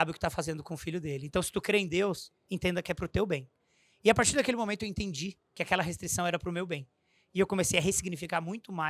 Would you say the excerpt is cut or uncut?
uncut